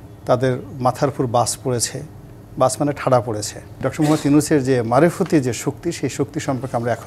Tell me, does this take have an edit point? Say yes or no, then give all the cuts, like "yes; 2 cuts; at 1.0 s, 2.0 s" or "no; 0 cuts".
yes; 1 cut; at 3.9 s